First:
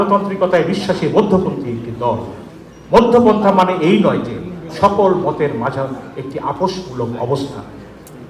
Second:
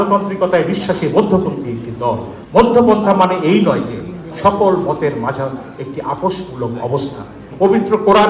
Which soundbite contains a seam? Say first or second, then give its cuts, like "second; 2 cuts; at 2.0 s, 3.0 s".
second; 2 cuts; at 2.3 s, 7.4 s